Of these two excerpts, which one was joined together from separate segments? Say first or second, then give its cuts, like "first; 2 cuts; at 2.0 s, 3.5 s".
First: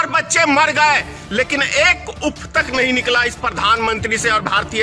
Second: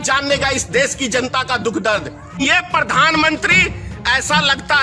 second; 1 cut; at 2.4 s